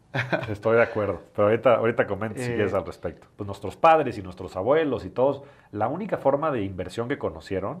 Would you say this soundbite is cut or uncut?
cut